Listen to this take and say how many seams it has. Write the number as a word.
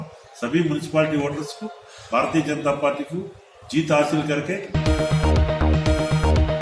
one